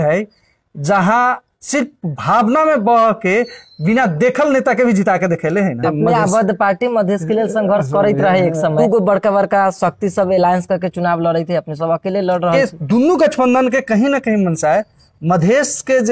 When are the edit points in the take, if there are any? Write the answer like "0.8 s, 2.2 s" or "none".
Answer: 5.8 s, 8.8 s, 12.5 s